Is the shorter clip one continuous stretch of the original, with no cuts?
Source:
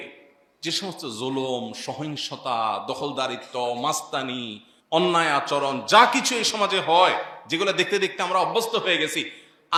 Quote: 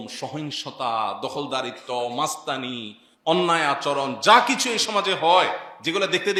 yes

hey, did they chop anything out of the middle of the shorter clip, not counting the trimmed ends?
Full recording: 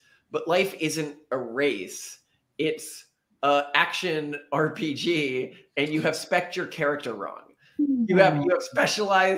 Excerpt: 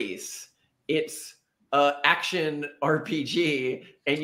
no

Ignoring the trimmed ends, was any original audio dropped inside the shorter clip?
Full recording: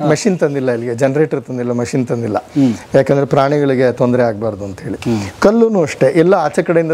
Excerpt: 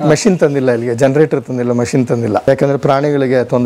yes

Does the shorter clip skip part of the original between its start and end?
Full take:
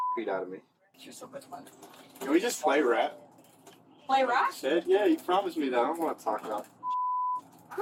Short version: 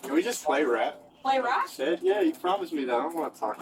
yes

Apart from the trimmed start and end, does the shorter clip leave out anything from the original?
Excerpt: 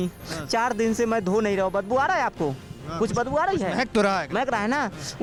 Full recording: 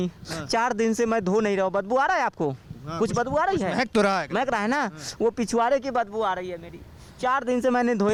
no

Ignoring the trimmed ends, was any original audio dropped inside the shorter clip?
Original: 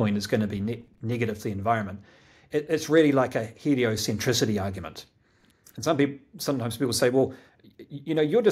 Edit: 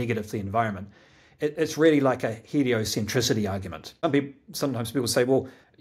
yes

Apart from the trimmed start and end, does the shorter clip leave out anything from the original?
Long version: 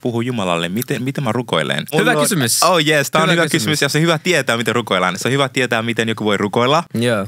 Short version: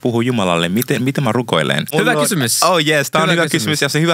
no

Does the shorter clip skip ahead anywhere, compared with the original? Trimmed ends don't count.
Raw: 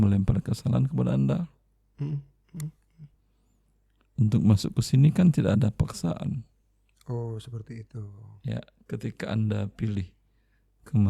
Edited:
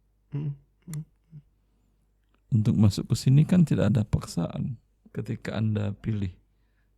yes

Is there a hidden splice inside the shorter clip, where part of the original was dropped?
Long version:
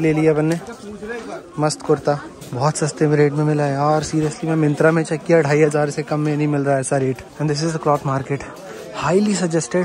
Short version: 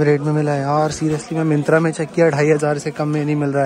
no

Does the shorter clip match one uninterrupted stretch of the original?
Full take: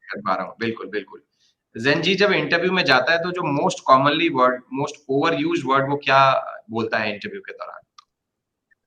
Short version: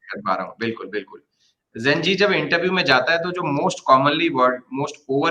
yes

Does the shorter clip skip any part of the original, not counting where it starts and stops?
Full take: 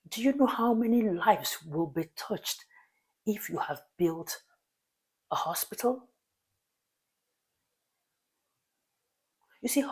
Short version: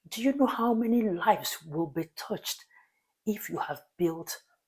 no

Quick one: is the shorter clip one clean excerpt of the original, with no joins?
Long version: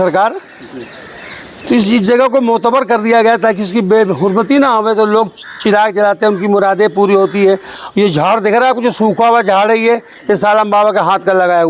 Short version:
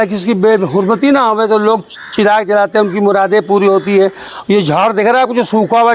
yes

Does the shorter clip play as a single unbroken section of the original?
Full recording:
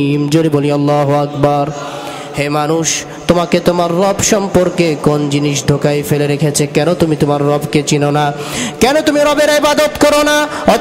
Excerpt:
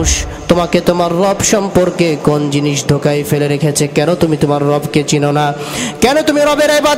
yes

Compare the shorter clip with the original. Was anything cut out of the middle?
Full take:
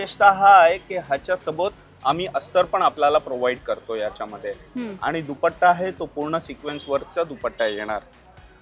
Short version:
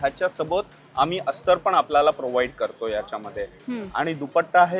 no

